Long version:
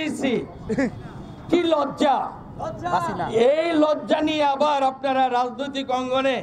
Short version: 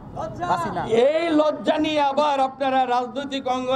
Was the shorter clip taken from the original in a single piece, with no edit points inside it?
yes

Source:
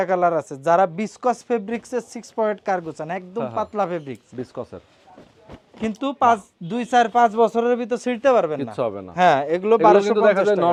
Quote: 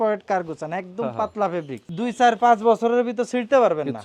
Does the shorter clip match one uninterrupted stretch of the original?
no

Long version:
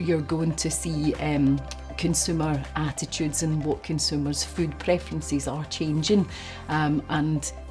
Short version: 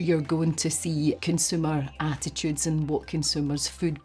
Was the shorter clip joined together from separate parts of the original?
yes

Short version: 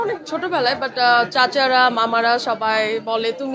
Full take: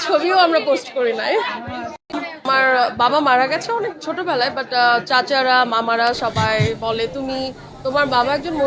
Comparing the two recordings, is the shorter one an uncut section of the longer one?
yes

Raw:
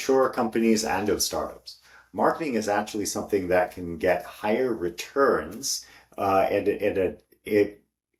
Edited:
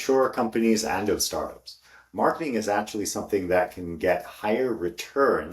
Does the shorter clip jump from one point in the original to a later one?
no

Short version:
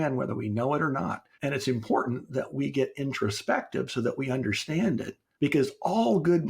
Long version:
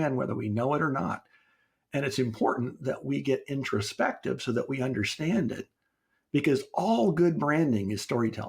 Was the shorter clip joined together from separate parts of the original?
yes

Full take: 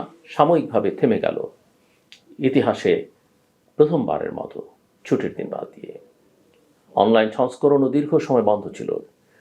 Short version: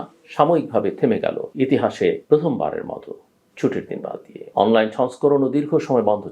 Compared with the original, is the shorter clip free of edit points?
no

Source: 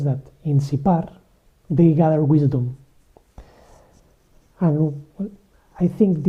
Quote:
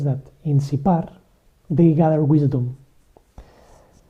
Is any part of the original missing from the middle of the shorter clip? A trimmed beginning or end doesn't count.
no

